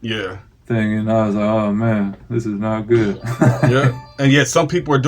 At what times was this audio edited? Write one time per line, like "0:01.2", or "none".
0:03.7